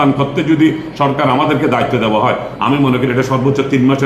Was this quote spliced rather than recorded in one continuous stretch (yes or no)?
no